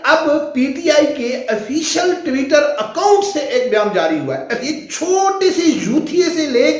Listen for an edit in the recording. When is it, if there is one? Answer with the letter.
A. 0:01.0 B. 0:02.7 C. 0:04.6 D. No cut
C